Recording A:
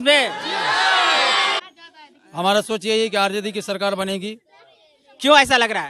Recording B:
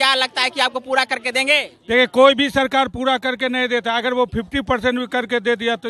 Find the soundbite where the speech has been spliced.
A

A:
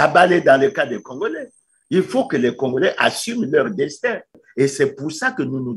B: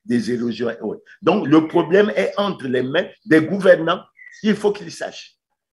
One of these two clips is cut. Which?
A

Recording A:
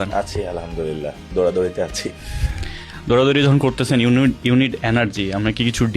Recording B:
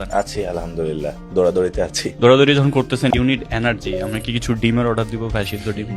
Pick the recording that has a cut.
B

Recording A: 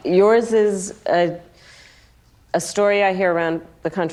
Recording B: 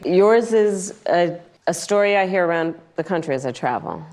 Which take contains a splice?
B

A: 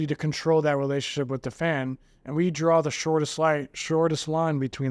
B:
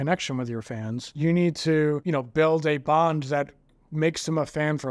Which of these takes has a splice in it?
B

